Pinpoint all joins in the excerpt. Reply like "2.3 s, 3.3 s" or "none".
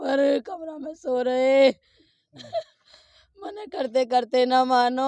none